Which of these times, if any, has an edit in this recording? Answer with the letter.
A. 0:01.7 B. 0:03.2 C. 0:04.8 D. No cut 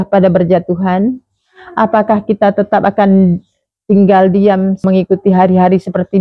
C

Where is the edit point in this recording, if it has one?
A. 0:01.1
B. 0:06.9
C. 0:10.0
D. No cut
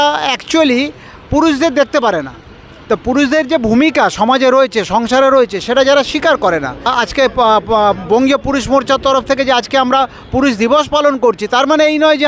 B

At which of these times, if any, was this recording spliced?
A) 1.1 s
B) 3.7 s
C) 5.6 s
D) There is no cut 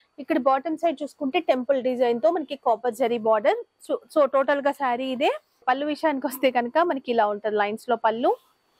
D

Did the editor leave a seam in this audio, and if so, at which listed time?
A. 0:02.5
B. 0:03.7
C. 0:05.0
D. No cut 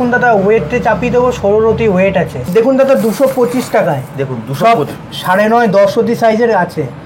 A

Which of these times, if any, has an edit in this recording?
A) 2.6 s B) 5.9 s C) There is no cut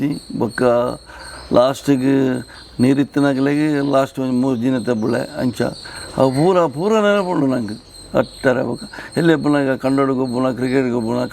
C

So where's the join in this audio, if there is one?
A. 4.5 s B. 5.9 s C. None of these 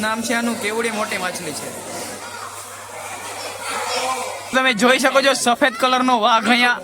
A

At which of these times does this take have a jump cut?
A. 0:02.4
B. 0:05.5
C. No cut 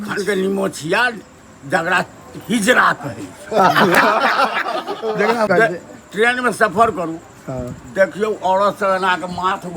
B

